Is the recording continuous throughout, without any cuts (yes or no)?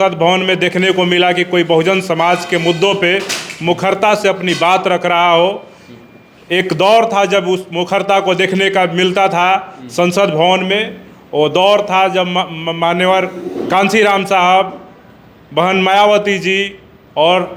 yes